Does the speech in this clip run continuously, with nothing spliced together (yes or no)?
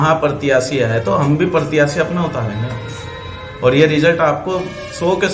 yes